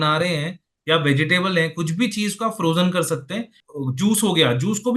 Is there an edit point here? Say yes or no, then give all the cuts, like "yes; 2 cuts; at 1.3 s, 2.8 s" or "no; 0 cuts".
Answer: yes; 1 cut; at 3.6 s